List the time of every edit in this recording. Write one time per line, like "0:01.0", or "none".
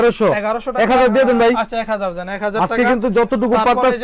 none